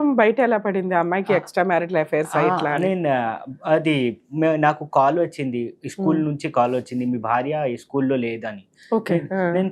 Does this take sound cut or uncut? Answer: uncut